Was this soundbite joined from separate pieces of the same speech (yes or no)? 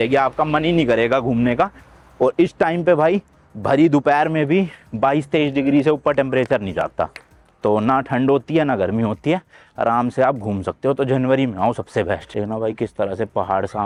no